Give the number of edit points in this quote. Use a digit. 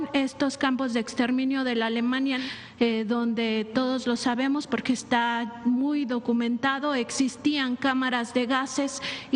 1